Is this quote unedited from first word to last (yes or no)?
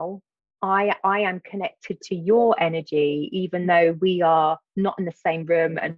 yes